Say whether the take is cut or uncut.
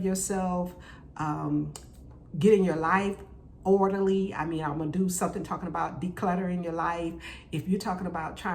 uncut